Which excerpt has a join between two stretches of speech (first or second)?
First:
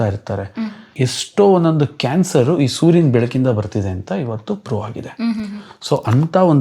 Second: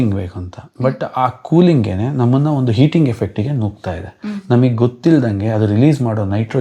first